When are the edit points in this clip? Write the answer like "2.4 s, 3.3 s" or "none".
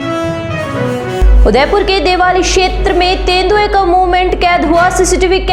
0.9 s